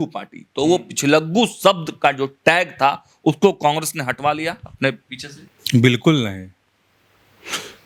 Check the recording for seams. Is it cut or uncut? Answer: uncut